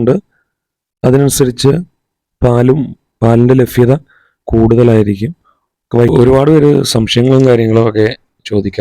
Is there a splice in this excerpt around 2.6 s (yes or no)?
no